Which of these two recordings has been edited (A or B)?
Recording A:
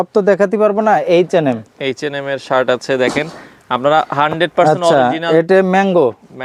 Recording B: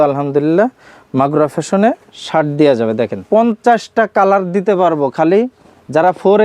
B